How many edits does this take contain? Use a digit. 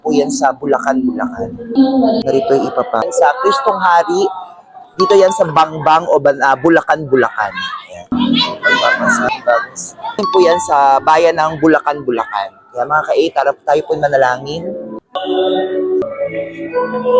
5